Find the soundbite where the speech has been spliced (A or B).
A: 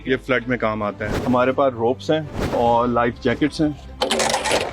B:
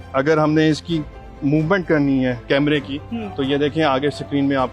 A